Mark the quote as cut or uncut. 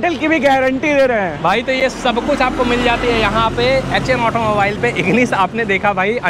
uncut